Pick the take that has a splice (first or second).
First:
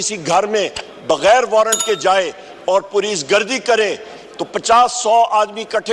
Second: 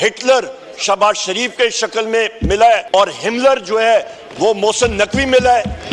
second